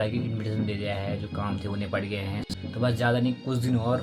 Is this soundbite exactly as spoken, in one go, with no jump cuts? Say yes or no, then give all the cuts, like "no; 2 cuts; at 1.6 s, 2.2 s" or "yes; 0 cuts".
no; 1 cut; at 2.5 s